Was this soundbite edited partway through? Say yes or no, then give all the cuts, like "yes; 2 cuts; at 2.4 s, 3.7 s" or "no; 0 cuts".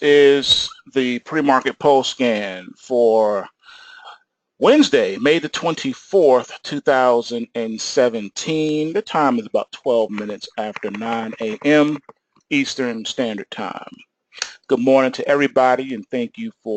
no; 0 cuts